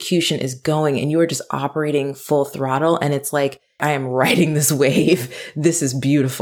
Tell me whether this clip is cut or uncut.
cut